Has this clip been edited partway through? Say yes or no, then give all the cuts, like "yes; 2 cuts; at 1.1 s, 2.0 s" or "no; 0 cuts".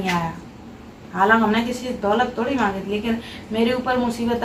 no; 0 cuts